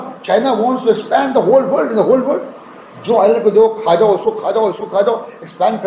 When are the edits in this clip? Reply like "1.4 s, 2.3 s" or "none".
none

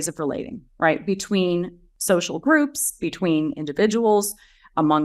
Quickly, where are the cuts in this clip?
1.9 s

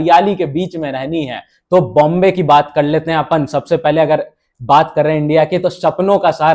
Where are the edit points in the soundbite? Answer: 1.5 s

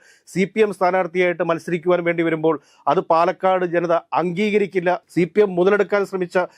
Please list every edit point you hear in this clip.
5.0 s

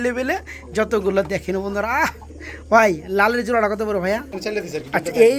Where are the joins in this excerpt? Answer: 4.3 s

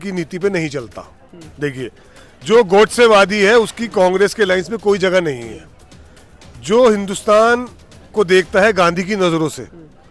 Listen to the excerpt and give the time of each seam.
none

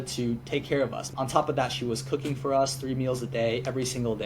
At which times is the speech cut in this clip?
1.1 s

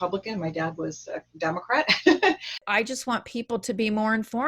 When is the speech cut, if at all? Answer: 2.6 s

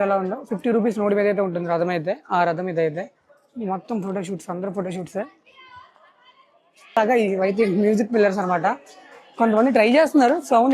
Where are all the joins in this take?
7.0 s

